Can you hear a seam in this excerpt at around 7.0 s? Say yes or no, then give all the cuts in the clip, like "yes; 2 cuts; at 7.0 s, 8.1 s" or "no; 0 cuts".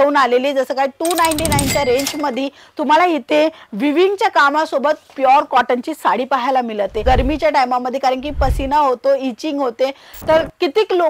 yes; 1 cut; at 7.0 s